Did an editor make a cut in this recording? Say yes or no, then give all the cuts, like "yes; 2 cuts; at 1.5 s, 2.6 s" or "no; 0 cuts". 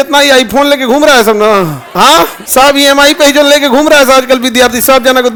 no; 0 cuts